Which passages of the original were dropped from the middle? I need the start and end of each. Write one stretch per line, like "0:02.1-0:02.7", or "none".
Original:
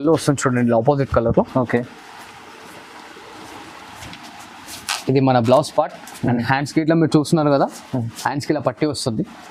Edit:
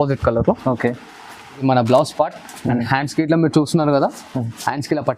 0:02.5-0:05.2